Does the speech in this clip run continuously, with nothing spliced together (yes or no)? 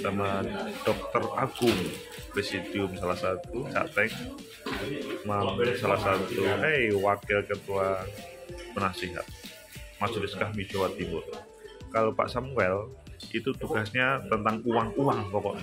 yes